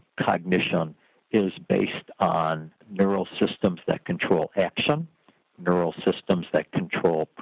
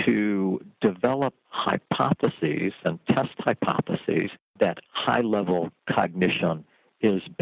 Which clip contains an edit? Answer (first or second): second